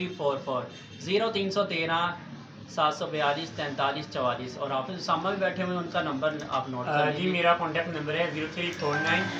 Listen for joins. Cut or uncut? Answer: cut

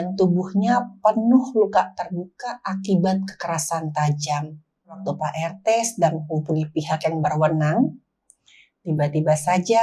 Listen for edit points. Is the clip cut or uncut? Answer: cut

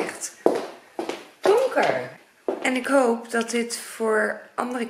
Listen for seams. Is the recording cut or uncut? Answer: cut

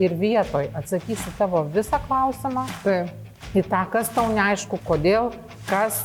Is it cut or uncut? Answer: uncut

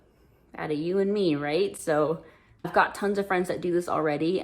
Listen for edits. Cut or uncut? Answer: cut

